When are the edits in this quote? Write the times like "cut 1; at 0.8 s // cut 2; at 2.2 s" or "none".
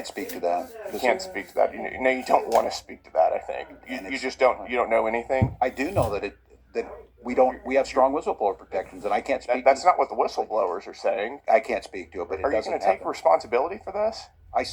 cut 1; at 3.8 s // cut 2; at 5.5 s // cut 3; at 11.2 s